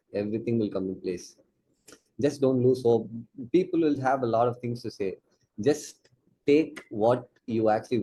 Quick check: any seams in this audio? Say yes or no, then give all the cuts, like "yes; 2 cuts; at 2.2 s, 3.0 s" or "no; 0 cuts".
no; 0 cuts